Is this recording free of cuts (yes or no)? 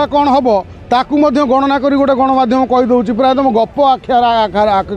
yes